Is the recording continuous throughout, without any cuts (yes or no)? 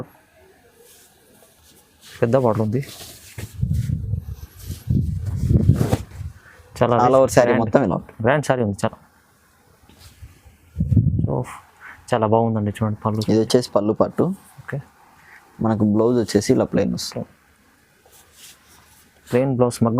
no